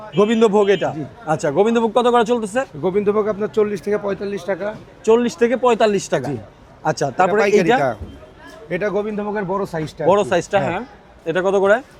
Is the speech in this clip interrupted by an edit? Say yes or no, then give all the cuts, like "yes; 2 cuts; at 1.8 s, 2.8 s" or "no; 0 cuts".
no; 0 cuts